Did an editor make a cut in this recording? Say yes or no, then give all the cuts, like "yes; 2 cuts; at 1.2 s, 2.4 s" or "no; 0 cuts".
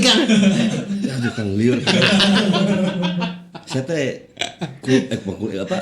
no; 0 cuts